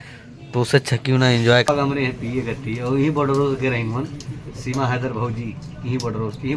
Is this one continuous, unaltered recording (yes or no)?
no